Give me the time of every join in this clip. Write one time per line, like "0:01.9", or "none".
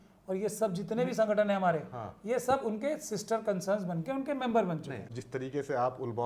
0:05.1